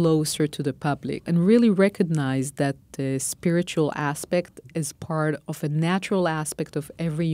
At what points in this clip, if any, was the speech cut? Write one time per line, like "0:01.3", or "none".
0:01.3